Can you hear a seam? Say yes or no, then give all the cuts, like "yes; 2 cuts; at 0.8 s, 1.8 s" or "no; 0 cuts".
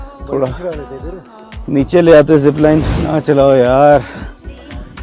yes; 1 cut; at 3.0 s